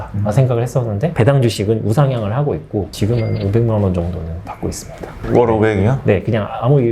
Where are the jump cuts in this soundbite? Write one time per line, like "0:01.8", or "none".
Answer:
0:01.1